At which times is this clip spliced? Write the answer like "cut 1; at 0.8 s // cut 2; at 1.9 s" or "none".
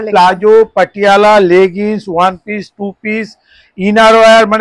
none